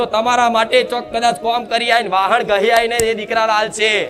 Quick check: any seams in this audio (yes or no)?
no